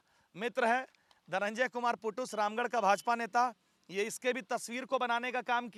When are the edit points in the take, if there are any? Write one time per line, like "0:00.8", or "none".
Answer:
none